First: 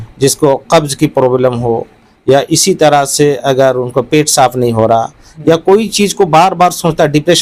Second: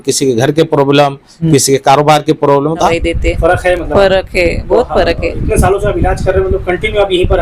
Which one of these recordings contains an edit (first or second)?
second